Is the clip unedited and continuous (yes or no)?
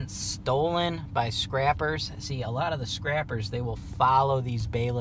yes